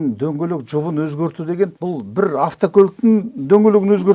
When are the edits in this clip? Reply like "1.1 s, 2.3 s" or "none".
1.8 s

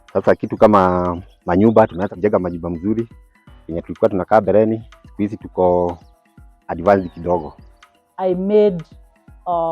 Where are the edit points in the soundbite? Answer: 2.1 s, 7.7 s

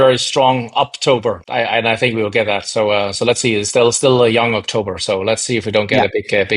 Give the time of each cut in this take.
1.4 s

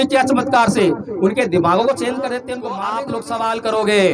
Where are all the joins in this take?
2.8 s

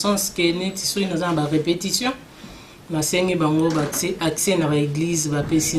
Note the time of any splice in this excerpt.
none

